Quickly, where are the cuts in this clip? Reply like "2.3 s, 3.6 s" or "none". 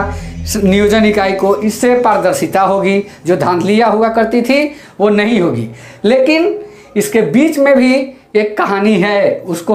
none